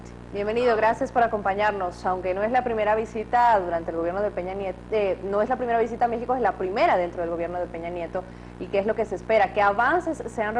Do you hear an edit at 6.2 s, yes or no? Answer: no